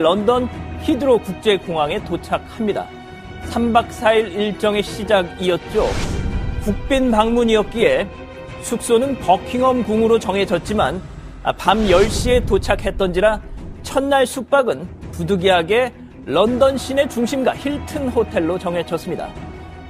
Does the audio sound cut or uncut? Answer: cut